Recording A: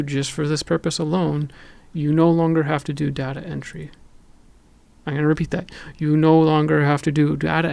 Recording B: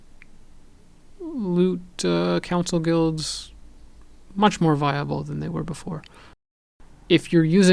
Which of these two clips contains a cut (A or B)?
B